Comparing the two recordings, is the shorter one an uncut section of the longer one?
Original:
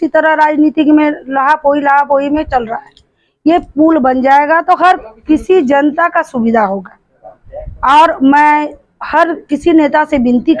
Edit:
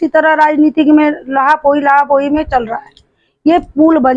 yes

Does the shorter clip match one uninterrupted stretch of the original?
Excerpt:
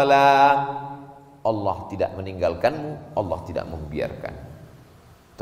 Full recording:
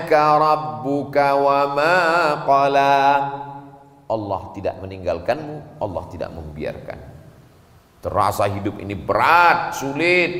yes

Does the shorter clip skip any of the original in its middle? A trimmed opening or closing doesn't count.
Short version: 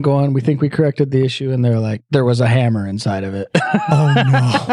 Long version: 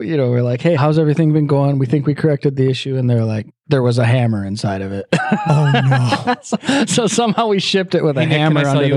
yes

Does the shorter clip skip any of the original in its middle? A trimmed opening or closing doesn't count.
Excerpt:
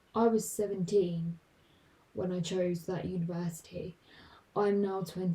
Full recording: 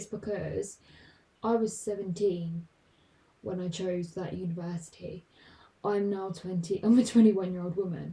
no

